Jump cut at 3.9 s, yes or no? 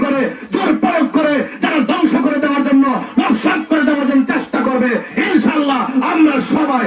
no